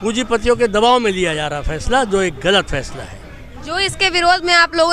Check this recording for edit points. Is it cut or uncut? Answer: uncut